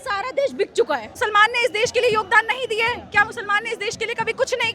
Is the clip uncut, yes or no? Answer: no